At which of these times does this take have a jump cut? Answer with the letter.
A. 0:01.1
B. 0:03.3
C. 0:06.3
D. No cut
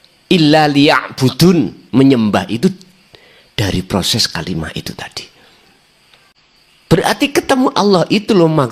C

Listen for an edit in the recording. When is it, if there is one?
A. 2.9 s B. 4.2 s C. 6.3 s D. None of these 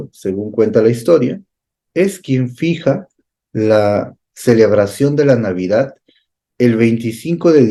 D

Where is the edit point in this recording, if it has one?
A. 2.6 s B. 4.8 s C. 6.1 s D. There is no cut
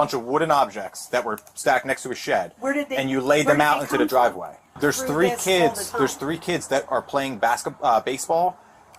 B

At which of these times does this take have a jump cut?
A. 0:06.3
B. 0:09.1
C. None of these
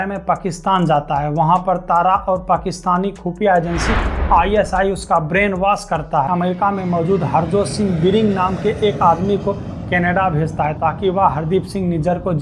A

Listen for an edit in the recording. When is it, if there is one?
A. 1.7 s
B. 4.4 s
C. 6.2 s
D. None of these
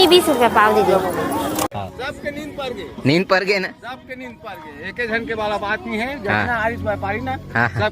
A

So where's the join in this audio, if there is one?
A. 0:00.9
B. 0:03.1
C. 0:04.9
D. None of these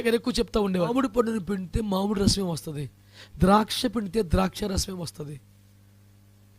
A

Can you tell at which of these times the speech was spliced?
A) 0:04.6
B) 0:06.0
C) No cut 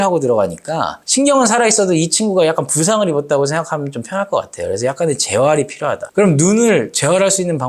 B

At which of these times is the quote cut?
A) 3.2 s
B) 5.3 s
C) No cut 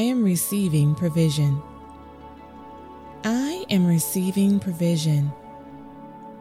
B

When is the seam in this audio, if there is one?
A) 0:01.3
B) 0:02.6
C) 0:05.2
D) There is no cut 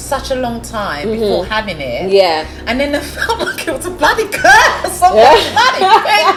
D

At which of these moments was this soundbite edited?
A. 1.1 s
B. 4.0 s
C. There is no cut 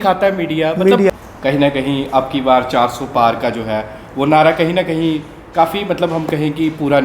A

